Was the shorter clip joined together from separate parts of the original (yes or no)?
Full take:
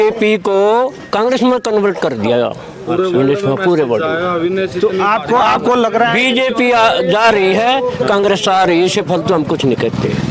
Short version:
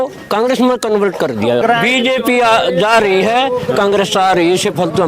yes